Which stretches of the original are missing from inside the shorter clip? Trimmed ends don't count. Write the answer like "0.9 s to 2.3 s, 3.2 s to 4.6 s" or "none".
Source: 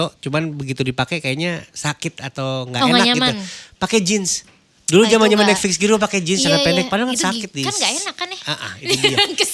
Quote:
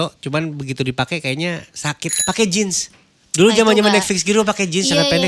2.1 s to 3.6 s

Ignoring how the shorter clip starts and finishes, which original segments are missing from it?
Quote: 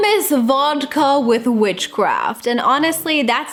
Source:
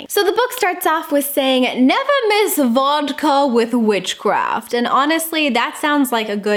none

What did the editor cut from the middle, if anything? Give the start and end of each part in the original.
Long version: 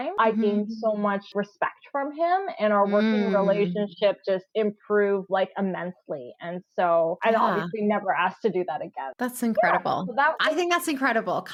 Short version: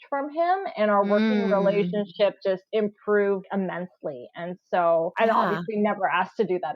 5.3 s to 5.5 s

